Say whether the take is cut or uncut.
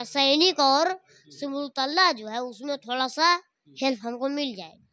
uncut